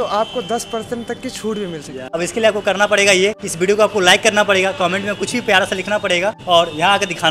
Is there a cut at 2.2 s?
yes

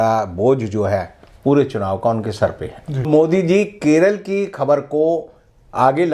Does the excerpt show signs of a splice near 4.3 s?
no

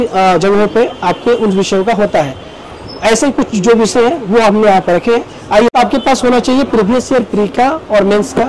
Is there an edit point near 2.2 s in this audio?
no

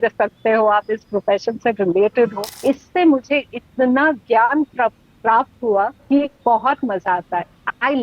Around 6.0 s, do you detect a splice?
no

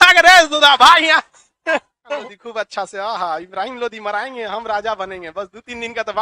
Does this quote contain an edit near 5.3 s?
no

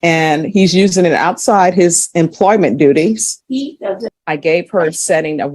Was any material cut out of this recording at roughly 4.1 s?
yes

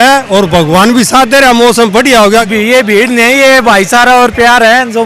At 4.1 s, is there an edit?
no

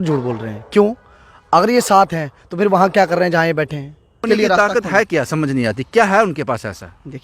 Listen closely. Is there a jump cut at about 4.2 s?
yes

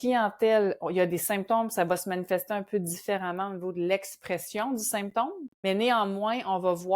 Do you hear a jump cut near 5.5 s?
yes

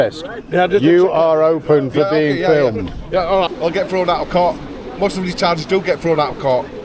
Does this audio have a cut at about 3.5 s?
yes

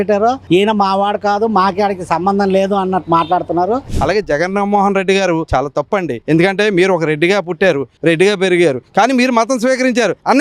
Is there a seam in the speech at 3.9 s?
yes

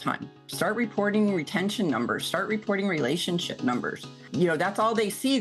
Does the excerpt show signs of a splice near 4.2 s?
yes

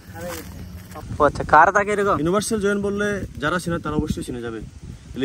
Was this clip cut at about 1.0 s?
yes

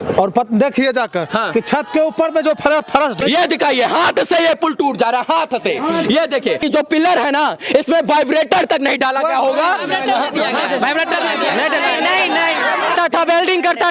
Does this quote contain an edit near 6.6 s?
yes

